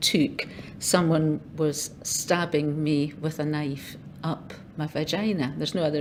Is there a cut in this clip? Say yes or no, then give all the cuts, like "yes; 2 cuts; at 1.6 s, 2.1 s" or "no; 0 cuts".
no; 0 cuts